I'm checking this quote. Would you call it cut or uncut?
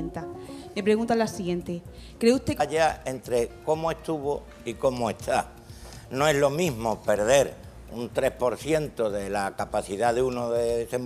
uncut